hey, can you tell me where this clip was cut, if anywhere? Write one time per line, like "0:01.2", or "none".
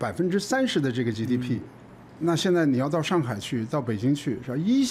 none